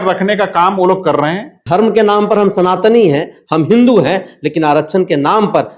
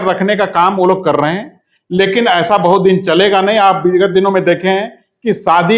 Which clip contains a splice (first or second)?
first